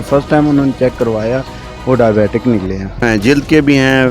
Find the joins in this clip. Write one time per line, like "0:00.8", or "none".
0:03.0